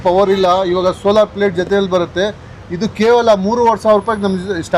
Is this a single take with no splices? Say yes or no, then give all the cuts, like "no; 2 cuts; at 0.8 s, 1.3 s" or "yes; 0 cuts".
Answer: yes; 0 cuts